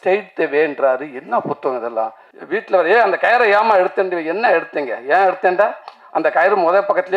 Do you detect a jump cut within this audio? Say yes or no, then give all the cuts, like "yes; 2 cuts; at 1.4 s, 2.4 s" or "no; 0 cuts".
yes; 1 cut; at 2.3 s